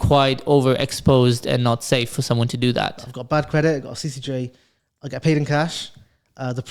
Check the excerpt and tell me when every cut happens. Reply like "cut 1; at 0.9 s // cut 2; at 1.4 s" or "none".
cut 1; at 3.0 s